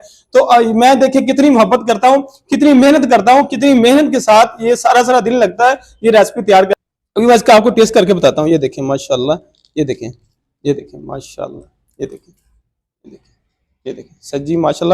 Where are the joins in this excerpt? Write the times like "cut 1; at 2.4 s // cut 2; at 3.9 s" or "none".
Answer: cut 1; at 6.7 s